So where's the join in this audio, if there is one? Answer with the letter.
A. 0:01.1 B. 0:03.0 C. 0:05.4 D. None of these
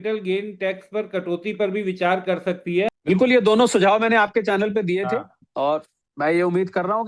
B